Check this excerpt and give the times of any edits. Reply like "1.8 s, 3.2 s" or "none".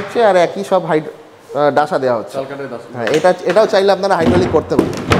none